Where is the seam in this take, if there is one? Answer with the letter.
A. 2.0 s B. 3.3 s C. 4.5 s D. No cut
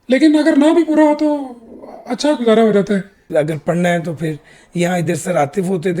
B